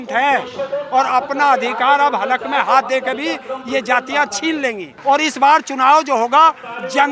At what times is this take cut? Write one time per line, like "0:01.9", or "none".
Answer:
0:04.9